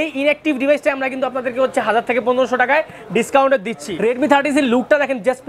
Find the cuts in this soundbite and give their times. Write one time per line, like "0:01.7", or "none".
0:03.9